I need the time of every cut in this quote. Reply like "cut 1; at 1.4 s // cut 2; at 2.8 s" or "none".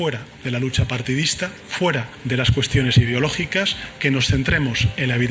cut 1; at 2.1 s

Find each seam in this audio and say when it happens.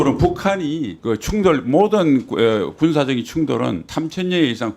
cut 1; at 0.9 s

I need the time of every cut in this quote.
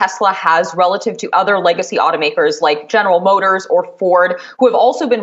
none

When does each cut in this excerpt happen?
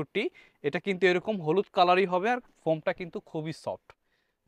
none

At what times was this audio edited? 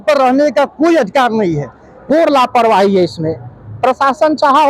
cut 1; at 2.1 s

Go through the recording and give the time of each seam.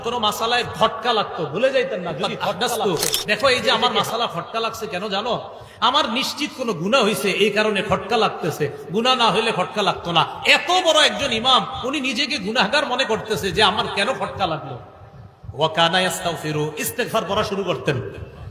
cut 1; at 2.8 s

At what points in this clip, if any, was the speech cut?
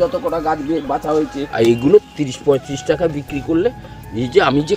cut 1; at 1.4 s

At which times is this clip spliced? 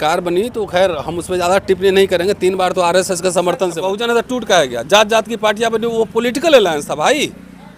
cut 1; at 3.9 s

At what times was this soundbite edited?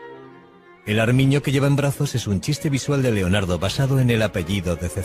cut 1; at 1.0 s

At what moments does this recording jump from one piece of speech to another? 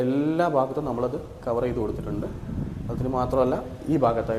none

